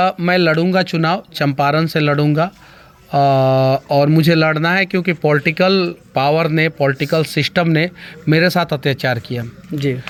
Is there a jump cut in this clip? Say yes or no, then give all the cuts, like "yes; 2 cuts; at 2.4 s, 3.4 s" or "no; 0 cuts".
no; 0 cuts